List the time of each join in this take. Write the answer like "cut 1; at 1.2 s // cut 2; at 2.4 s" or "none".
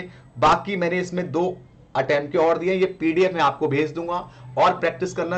none